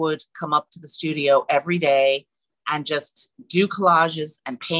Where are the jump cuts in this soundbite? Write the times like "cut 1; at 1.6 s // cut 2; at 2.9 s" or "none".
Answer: none